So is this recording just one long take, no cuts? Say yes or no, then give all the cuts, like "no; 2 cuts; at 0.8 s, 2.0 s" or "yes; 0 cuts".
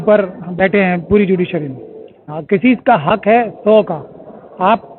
no; 1 cut; at 2.3 s